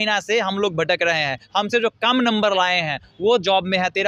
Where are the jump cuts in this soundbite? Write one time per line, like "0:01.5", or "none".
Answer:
none